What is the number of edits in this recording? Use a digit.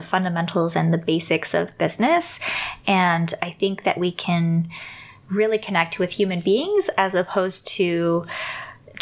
0